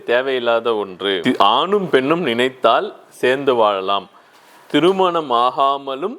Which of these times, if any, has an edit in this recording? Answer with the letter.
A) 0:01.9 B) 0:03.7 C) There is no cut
C